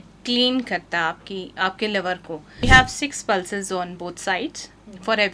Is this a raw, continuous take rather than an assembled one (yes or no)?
no